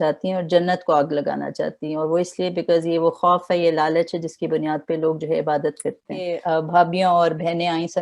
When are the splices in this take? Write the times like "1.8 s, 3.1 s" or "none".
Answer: 6.3 s